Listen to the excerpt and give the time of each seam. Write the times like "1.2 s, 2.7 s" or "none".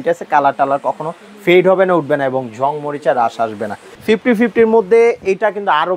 3.9 s